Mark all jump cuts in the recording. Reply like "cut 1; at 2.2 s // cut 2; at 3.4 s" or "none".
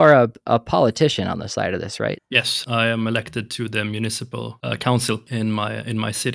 cut 1; at 2.2 s // cut 2; at 4.5 s // cut 3; at 5.2 s